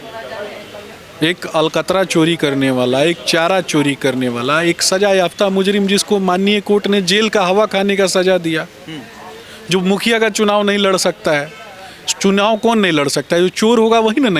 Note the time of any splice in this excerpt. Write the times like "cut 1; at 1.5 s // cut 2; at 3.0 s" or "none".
none

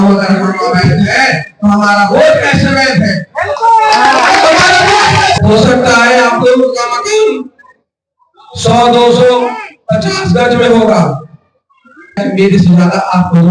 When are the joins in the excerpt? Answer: cut 1; at 5.4 s

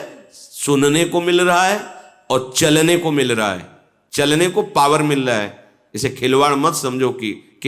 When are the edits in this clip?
none

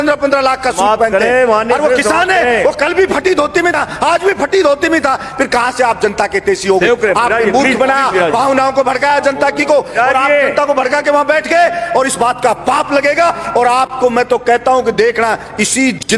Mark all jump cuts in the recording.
none

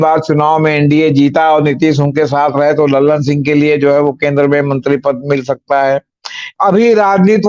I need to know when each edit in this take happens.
cut 1; at 6.5 s

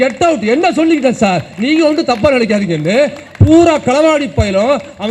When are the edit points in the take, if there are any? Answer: none

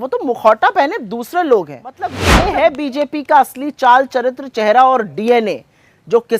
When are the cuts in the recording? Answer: cut 1; at 2.2 s

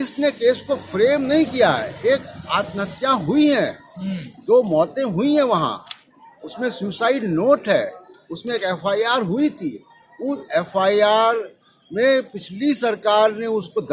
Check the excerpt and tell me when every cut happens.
none

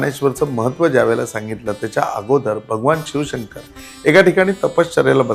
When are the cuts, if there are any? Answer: none

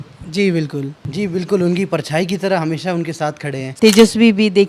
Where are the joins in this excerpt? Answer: cut 1; at 1.0 s // cut 2; at 3.7 s

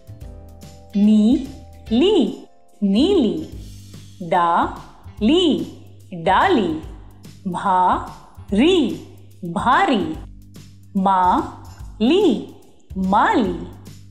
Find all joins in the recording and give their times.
cut 1; at 0.9 s

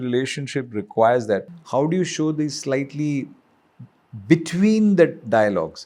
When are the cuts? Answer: cut 1; at 1.5 s

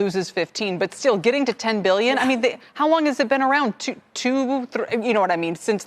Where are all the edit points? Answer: cut 1; at 2.6 s

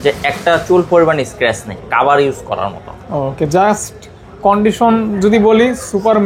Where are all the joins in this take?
none

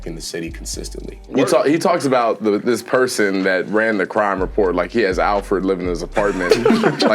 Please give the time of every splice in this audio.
cut 1; at 1.2 s

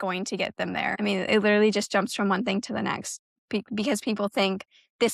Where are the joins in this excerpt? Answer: cut 1; at 0.9 s

